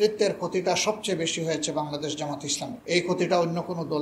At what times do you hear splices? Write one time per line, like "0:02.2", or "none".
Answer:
0:02.8